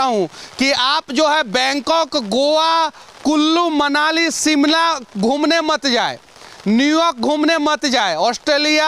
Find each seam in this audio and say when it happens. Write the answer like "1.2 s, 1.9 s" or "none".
none